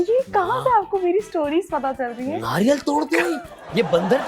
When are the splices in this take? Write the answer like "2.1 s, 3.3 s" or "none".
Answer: none